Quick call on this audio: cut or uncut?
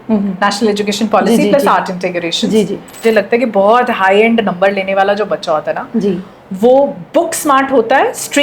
cut